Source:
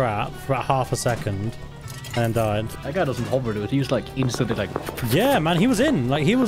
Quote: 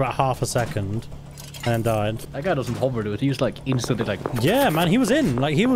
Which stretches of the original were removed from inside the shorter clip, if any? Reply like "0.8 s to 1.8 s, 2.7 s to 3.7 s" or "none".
4.8 s to 5.0 s